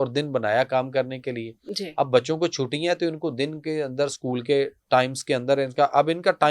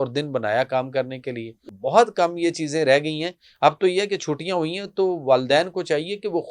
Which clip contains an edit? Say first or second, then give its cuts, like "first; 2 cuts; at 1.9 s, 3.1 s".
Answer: second; 1 cut; at 1.6 s